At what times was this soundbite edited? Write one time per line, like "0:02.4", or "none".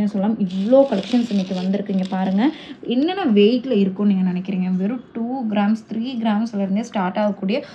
none